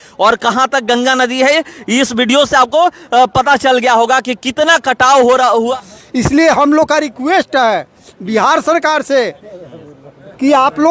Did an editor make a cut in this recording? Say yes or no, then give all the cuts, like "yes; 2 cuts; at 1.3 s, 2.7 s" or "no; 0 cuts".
yes; 1 cut; at 5.7 s